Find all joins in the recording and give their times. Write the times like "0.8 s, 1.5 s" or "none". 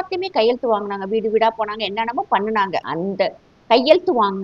2.9 s